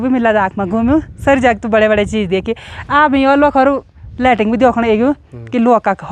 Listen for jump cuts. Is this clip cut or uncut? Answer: uncut